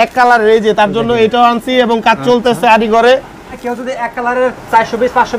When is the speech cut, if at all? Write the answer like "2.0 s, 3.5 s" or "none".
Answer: 3.6 s